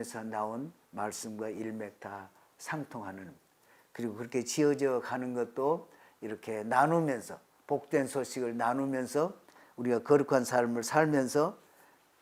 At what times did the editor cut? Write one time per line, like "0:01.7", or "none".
none